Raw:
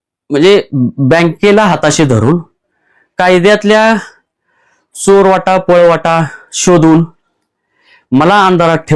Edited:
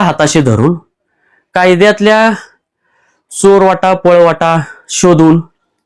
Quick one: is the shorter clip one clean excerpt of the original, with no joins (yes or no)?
yes